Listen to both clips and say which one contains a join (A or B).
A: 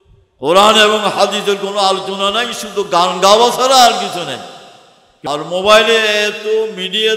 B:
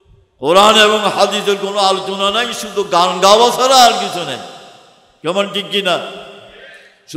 A